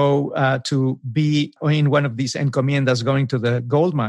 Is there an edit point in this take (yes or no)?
yes